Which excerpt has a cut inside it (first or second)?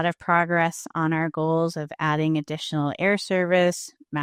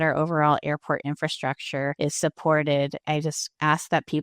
second